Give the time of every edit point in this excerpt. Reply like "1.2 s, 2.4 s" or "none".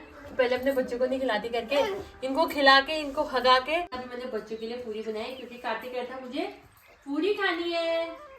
4.0 s